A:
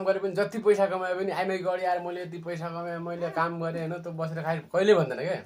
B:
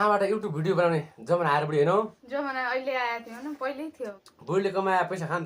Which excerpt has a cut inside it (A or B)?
B